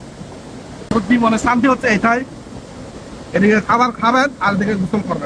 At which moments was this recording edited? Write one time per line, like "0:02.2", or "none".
0:01.0